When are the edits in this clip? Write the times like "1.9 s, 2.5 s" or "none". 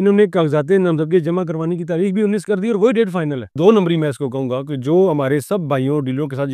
3.5 s